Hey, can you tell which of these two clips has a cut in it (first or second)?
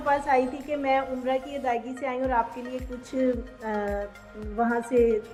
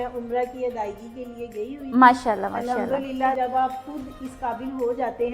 second